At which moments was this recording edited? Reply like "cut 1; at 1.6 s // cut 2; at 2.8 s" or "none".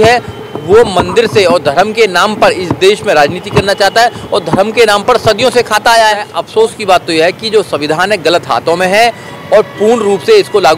cut 1; at 6.4 s